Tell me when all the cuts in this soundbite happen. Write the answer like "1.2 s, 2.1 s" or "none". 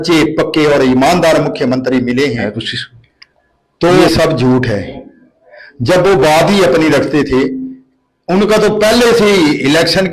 4.0 s